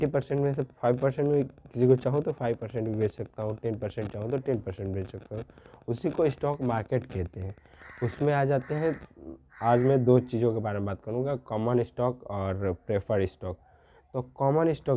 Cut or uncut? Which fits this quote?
uncut